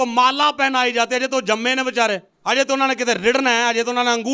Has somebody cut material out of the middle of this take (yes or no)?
yes